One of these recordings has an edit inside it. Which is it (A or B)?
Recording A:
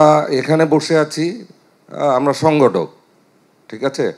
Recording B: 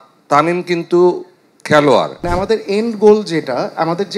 B